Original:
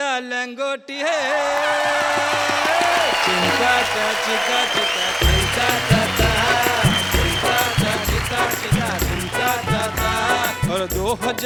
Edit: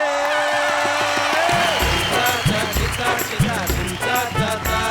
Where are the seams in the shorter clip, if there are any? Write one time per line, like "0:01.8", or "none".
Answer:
0:01.9